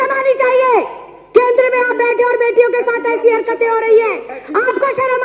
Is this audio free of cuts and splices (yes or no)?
yes